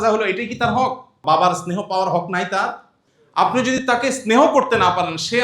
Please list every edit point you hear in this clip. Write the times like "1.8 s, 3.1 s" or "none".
1.1 s